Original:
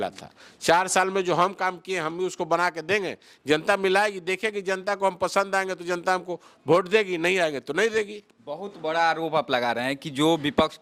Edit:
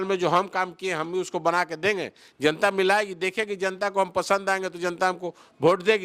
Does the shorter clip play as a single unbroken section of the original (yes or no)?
yes